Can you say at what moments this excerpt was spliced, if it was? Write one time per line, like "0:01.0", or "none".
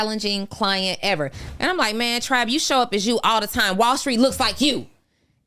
0:01.4